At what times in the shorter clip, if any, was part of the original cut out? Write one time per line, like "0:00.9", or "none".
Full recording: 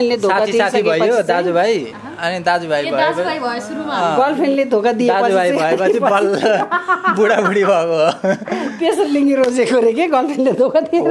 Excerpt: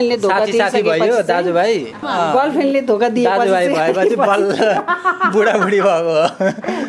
0:02.0